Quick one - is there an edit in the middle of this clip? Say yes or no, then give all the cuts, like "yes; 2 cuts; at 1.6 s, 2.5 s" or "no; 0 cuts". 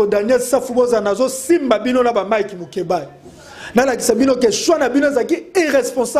no; 0 cuts